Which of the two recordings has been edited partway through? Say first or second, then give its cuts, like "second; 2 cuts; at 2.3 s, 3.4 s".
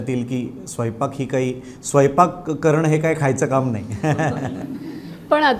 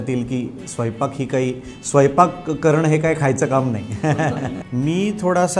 second; 1 cut; at 4.6 s